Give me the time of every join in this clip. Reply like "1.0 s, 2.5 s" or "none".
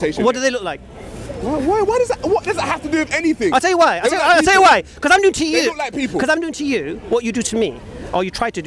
none